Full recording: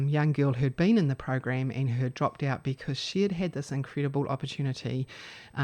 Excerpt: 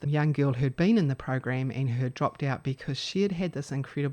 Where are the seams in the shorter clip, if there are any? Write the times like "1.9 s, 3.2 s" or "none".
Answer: none